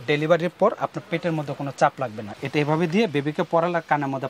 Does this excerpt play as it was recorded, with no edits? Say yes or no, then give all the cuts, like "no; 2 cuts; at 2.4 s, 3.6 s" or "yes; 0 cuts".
no; 1 cut; at 2.4 s